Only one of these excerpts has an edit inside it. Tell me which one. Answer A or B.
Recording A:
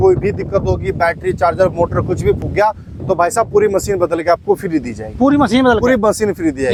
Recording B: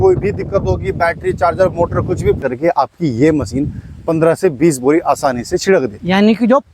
B